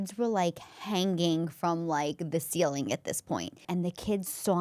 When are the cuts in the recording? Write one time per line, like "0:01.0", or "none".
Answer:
0:03.7